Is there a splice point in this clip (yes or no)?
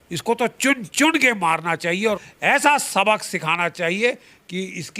yes